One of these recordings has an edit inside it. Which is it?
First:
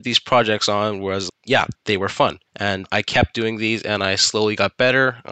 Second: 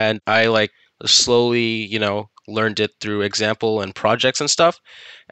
first; 2 cuts; at 1.3 s, 2.5 s

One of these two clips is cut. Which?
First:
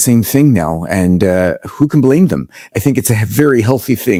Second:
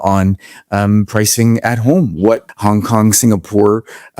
second; 1 cut; at 2.5 s

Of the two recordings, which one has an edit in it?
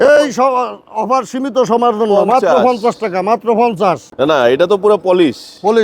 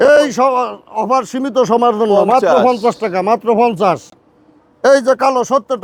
first; 1 cut; at 4.1 s

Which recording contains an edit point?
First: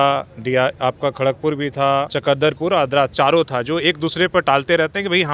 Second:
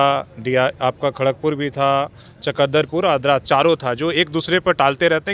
first; 1 cut; at 2.1 s

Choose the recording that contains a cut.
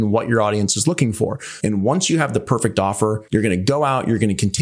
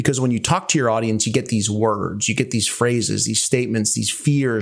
first; 2 cuts; at 1.5 s, 3.2 s

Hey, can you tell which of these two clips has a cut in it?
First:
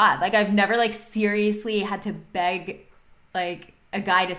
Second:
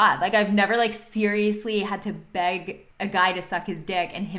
second; 1 cut; at 2.8 s

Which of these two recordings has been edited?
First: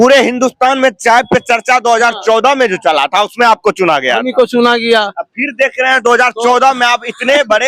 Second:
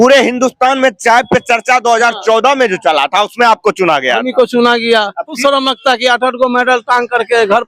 second; 1 cut; at 5.4 s

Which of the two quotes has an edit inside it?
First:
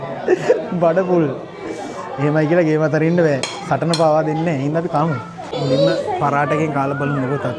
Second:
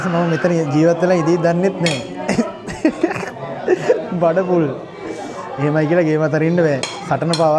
first; 1 cut; at 5.5 s

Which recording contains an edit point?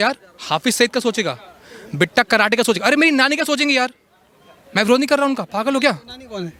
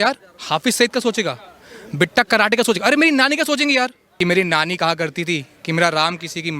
second; 1 cut; at 4.0 s

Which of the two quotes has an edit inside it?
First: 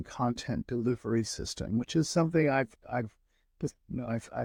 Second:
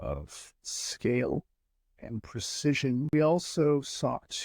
second; 1 cut; at 3.1 s

